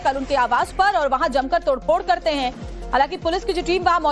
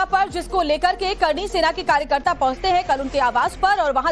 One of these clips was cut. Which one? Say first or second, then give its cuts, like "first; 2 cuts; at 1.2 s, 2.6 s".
first; 1 cut; at 2.4 s